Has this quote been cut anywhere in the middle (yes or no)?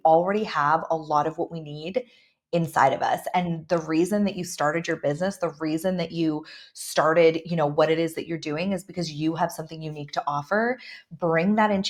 no